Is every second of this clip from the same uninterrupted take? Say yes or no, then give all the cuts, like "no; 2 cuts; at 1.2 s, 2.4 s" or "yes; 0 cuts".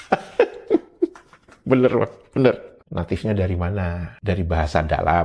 no; 1 cut; at 2.8 s